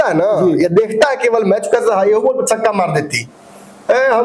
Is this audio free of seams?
yes; 0 cuts

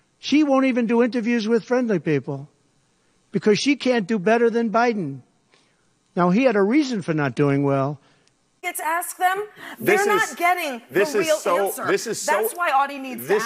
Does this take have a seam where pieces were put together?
yes; 1 cut; at 8.7 s

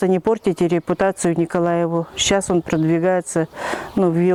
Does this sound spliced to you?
no; 0 cuts

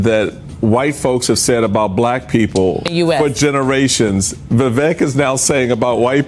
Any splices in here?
yes; 1 cut; at 2.9 s

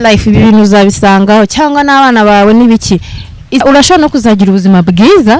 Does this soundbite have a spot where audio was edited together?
yes; 1 cut; at 3.6 s

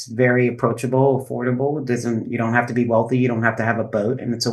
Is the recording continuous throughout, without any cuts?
yes; 0 cuts

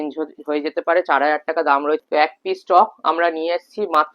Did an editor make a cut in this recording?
yes; 1 cut; at 2.0 s

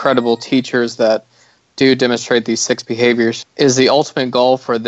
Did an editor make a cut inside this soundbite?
yes; 1 cut; at 3.4 s

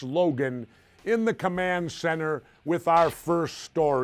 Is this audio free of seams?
no; 1 cut; at 2.9 s

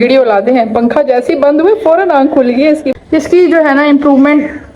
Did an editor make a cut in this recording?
yes; 1 cut; at 2.9 s

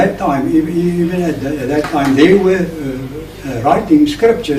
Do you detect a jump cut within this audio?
yes; 1 cut; at 2.8 s

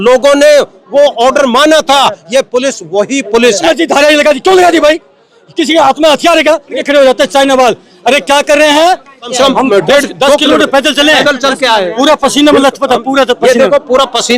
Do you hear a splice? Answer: yes; 3 cuts; at 3.6 s, 6.8 s, 9.3 s

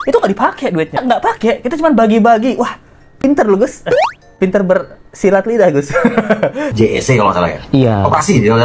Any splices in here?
yes; 2 cuts; at 1.0 s, 6.7 s

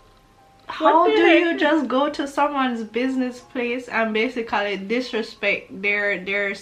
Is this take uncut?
yes; 0 cuts

